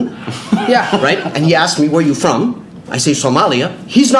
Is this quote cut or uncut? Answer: uncut